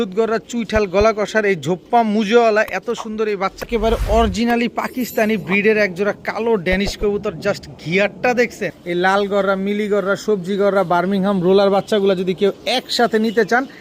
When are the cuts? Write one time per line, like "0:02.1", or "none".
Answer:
0:03.7
0:08.7